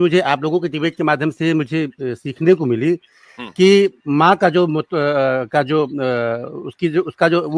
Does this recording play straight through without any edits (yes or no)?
yes